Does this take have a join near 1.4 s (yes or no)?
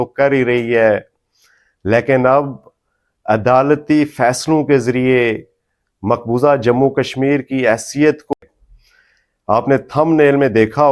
no